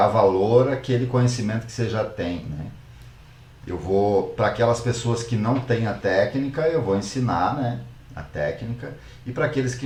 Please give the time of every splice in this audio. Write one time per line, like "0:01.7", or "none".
none